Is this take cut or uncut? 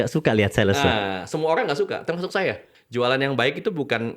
cut